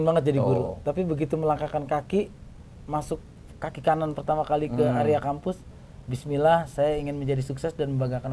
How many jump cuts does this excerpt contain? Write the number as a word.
zero